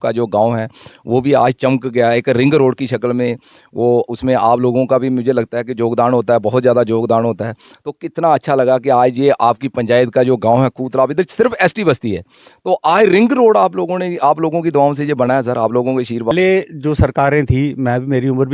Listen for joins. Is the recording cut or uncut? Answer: cut